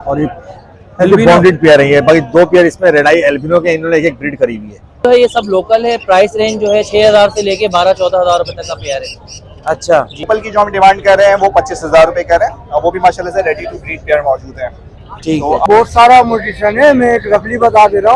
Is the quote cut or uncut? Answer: cut